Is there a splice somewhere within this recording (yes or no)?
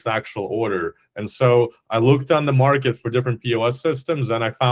no